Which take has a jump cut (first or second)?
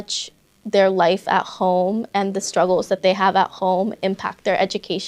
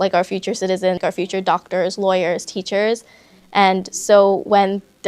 second